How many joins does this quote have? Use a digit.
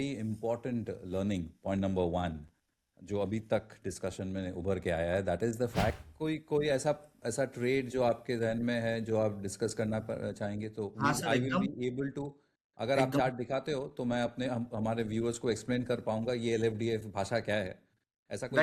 1